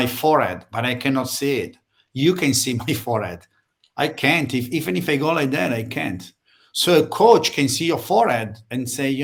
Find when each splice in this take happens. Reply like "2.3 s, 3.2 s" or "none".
none